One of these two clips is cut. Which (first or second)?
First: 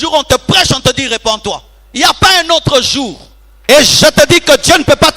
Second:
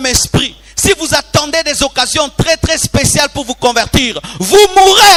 first